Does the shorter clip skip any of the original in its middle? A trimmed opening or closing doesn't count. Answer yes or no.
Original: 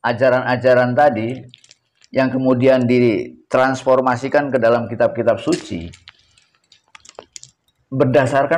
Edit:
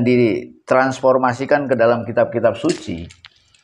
no